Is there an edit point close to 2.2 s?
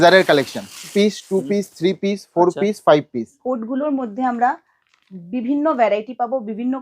no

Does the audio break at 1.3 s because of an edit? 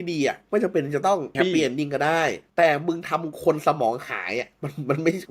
yes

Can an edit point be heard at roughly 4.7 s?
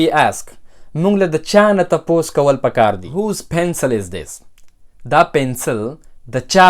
no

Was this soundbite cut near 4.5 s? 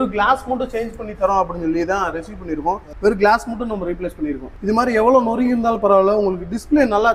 no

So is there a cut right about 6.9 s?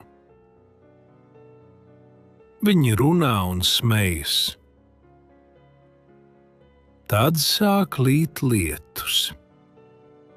yes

